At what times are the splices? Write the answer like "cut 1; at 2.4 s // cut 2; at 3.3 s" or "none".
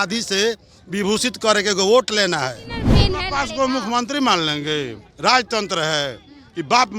cut 1; at 2.9 s